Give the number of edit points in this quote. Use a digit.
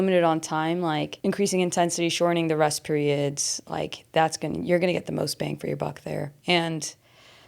2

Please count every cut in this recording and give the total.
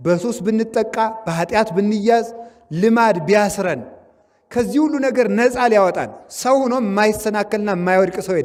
0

